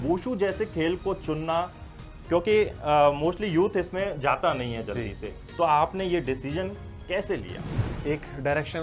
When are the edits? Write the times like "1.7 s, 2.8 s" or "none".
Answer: 7.9 s